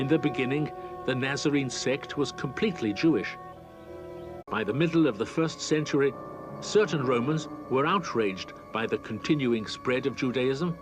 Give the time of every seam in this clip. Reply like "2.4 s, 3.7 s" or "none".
none